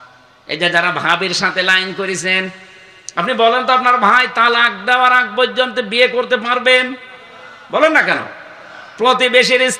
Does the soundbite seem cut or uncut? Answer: uncut